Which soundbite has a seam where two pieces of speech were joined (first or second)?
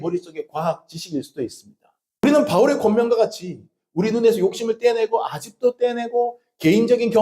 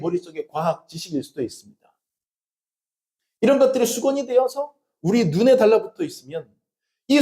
first